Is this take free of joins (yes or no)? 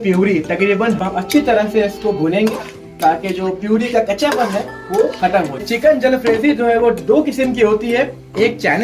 no